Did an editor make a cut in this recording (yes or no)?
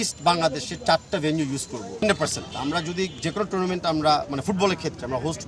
yes